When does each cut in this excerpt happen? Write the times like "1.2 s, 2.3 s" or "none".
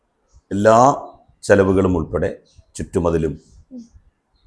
none